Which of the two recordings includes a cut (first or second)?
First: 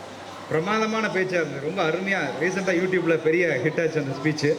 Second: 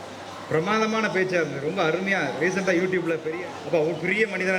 second